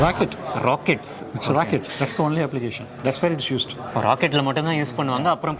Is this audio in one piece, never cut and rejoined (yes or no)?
yes